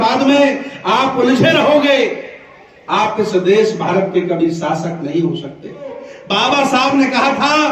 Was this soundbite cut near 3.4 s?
no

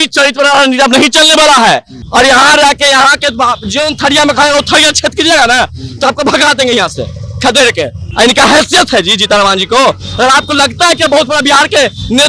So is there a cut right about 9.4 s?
no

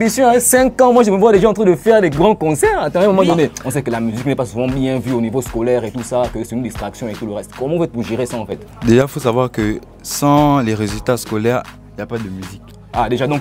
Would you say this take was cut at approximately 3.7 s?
yes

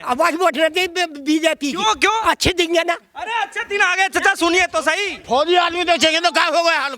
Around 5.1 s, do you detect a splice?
yes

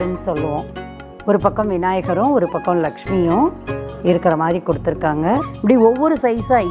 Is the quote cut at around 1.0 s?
yes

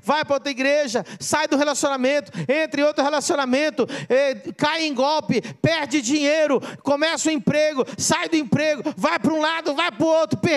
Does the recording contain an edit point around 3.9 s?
no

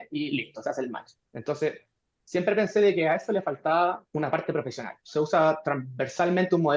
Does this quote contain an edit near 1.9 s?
no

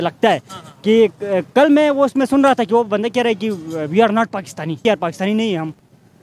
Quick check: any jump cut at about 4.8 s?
yes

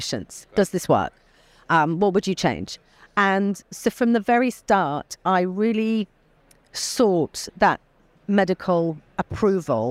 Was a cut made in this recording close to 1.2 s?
no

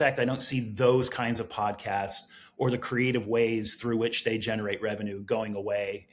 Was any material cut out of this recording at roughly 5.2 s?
no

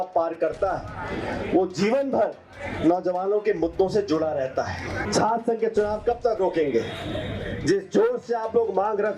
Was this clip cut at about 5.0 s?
yes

